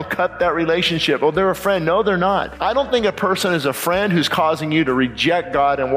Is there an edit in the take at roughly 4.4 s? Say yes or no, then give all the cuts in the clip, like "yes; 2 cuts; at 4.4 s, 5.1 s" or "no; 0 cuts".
no; 1 cut; at 2.5 s